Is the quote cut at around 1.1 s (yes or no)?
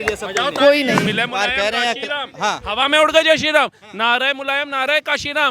yes